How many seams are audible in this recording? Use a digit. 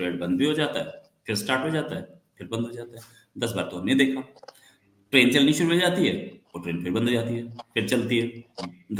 0